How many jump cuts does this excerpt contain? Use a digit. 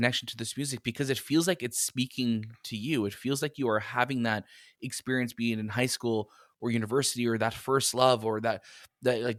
0